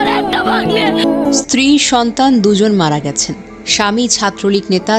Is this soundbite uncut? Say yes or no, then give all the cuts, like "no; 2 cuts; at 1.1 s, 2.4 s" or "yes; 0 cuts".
no; 1 cut; at 1.4 s